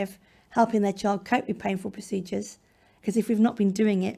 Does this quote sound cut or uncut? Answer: cut